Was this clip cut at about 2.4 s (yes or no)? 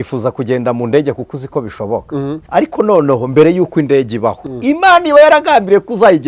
yes